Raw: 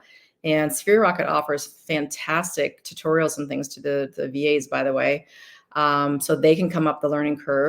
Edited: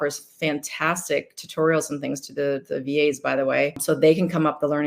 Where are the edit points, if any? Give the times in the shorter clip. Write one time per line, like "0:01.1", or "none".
0:03.8